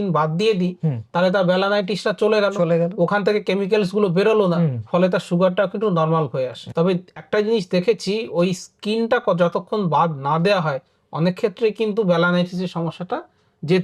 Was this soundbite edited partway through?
yes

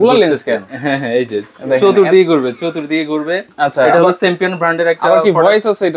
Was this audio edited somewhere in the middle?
no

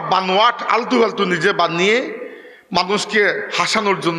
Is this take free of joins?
yes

